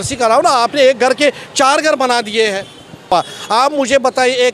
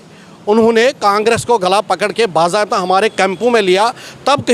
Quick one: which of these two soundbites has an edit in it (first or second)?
first